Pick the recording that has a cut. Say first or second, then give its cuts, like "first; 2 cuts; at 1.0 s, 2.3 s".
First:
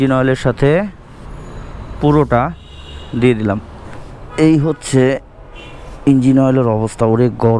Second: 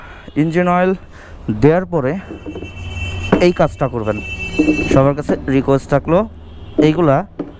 first; 1 cut; at 4.2 s